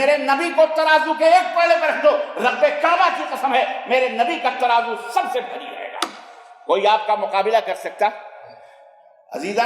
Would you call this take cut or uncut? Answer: uncut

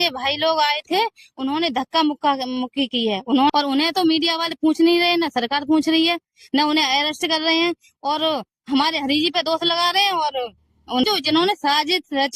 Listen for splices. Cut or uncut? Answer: cut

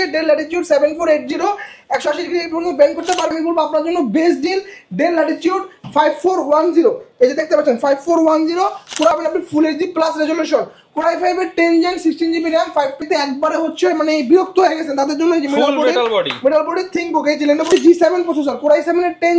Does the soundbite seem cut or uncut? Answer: cut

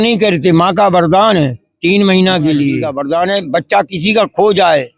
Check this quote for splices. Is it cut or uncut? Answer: cut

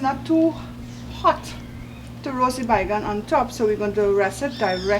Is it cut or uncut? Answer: uncut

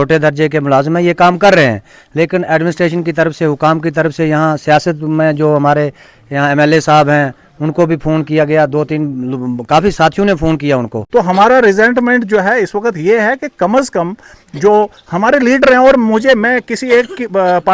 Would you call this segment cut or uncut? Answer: cut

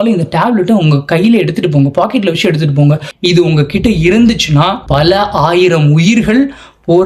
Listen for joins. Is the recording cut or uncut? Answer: cut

